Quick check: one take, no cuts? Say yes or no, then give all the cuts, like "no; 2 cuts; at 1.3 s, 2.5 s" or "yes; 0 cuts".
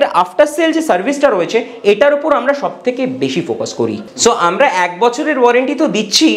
no; 1 cut; at 4.1 s